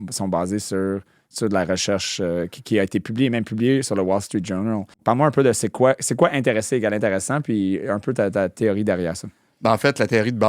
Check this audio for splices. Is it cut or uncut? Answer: cut